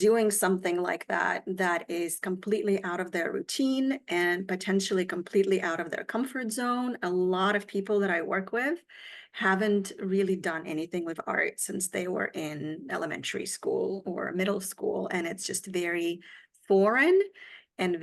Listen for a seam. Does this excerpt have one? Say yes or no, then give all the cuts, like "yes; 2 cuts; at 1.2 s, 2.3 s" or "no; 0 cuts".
no; 0 cuts